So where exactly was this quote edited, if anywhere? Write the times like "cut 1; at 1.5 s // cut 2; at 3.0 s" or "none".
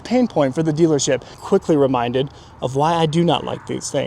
cut 1; at 1.4 s